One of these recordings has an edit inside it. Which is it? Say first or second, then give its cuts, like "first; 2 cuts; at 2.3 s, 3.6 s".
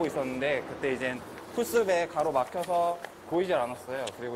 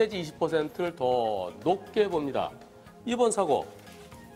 second; 1 cut; at 2.2 s